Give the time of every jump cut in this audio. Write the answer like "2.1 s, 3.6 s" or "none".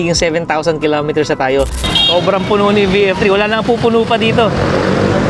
1.8 s

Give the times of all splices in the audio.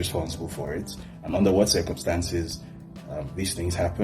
none

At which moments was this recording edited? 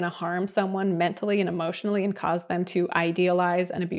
none

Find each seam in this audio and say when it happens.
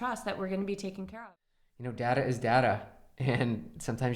1.1 s

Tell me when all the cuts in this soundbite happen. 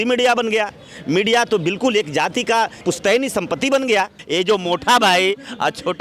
2.8 s, 4.2 s

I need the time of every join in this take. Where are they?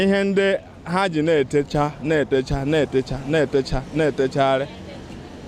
none

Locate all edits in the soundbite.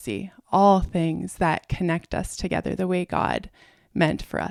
none

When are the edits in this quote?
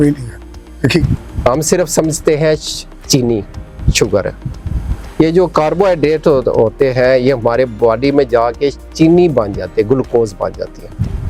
1.2 s

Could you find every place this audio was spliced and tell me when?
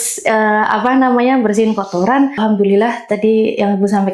2.4 s

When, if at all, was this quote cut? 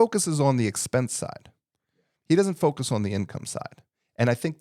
none

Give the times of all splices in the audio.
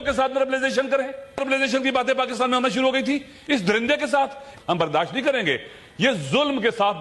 1.4 s, 4.4 s

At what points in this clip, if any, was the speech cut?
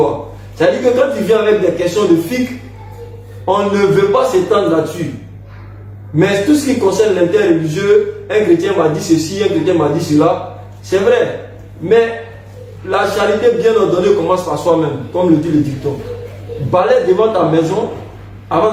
none

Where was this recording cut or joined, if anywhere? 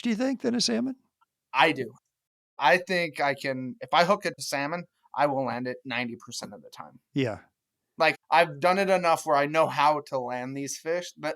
2.3 s

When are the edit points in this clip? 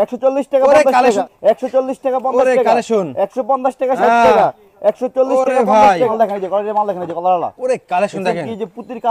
1.2 s, 6.1 s

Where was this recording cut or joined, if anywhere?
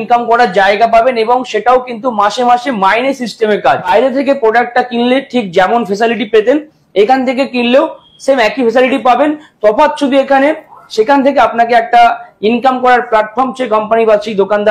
3.9 s

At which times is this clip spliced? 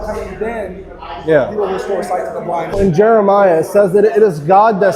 2.8 s

